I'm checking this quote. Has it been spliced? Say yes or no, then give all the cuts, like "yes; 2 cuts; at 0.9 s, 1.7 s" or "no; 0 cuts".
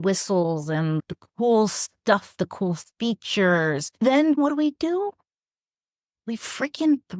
yes; 2 cuts; at 1.0 s, 4.4 s